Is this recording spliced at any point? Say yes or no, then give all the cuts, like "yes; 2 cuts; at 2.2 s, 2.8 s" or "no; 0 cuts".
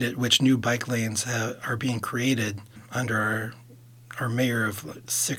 yes; 1 cut; at 2.8 s